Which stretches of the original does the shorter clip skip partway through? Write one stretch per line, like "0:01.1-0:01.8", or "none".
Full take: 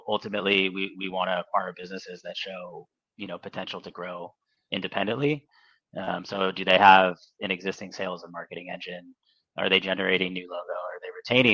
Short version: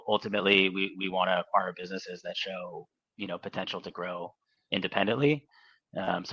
none